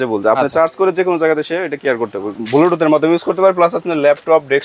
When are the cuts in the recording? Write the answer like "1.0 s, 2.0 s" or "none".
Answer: 2.4 s

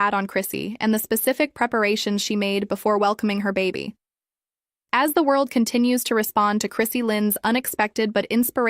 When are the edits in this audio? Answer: 5.6 s, 6.7 s

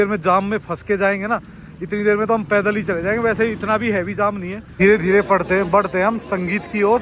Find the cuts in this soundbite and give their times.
4.6 s

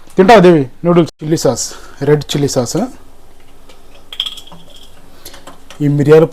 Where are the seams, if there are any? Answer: 1.2 s

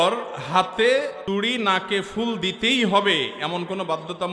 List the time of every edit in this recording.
none

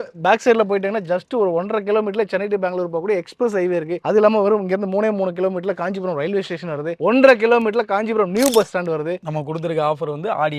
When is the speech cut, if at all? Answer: 4.0 s, 9.2 s

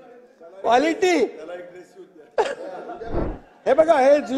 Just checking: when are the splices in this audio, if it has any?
3.2 s

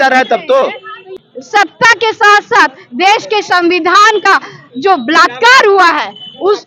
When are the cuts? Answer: 1.2 s

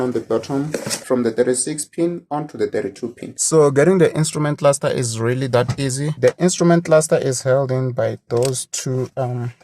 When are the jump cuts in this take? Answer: 1.0 s, 3.3 s, 6.2 s

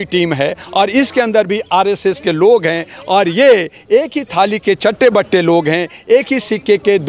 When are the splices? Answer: none

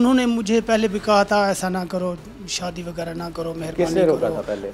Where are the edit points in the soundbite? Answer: none

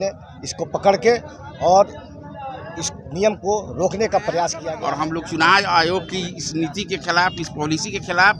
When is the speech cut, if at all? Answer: 4.7 s

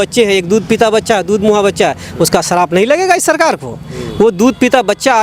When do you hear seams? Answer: none

